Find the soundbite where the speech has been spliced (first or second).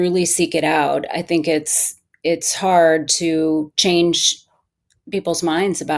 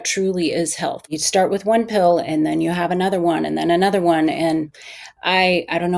second